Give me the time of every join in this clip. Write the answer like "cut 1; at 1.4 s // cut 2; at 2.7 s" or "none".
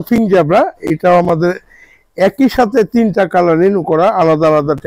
none